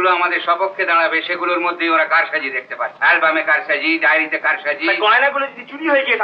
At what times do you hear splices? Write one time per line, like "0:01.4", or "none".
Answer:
0:02.9